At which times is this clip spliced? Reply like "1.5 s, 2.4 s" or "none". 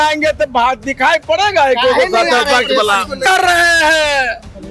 3.2 s